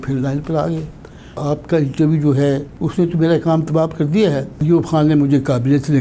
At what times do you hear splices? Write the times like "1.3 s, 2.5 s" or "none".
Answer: 1.4 s, 2.8 s, 4.6 s